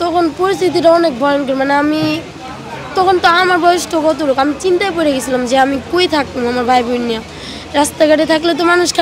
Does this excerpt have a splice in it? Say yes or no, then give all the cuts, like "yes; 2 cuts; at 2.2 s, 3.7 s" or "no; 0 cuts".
no; 0 cuts